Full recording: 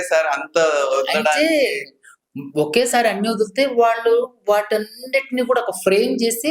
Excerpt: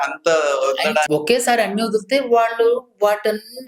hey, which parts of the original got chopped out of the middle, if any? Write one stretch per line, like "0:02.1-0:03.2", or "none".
0:01.4-0:02.5